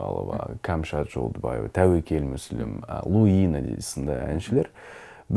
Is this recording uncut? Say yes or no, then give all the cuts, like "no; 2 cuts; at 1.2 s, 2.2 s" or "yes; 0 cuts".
yes; 0 cuts